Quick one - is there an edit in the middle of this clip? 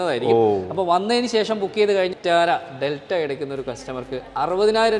yes; 1 cut; at 2.1 s

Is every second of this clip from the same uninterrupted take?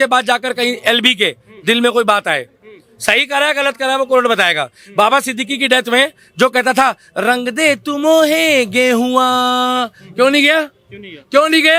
yes; 0 cuts

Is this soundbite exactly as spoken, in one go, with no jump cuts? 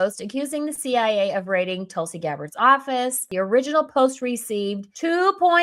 no; 1 cut; at 3.3 s

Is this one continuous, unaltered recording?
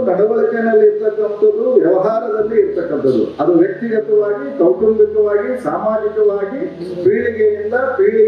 yes; 0 cuts

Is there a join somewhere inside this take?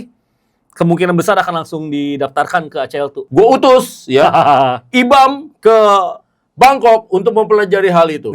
yes; 1 cut; at 3.2 s

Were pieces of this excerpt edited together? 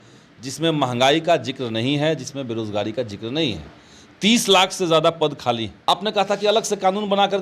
yes; 1 cut; at 5.7 s

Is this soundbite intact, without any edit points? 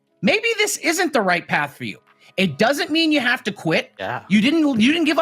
no; 1 cut; at 3.9 s

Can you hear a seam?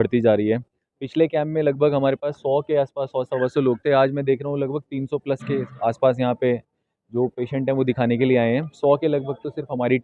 no; 0 cuts

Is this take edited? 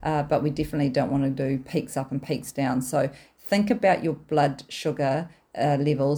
no; 0 cuts

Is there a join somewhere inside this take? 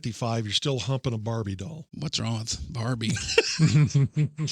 yes; 1 cut; at 1.8 s

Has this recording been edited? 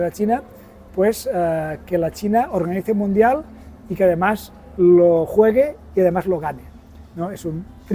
no; 0 cuts

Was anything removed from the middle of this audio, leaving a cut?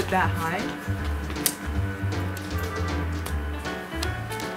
no; 0 cuts

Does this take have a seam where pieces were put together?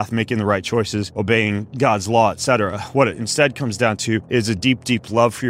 yes; 2 cuts; at 1.1 s, 4.2 s

